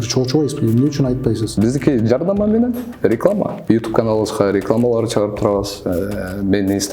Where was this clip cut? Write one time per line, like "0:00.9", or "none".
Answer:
0:01.6
0:03.6